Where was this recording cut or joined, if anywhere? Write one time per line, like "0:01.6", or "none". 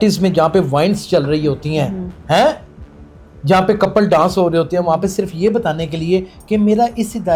none